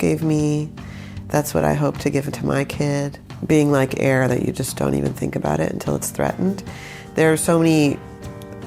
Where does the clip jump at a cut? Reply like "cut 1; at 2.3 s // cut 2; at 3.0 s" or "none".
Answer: cut 1; at 3.3 s